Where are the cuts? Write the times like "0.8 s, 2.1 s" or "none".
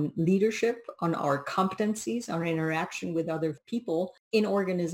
3.8 s